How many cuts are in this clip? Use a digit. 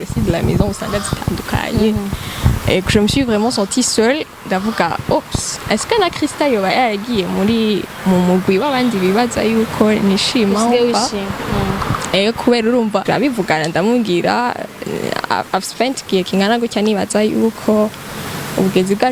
1